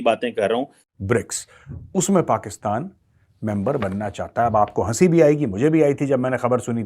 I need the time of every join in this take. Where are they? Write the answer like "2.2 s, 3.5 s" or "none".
1.4 s